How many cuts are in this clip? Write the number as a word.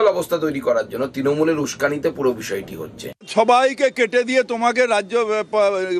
one